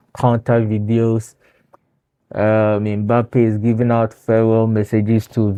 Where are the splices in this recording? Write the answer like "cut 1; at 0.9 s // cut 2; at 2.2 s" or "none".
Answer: none